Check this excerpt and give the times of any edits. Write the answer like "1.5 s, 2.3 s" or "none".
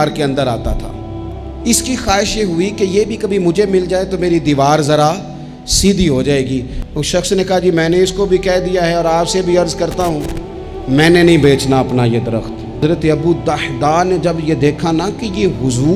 6.8 s, 12.8 s